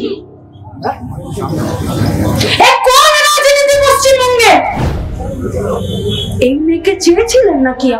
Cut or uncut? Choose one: cut